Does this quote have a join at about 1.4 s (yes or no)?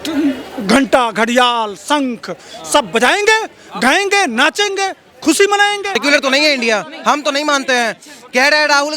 no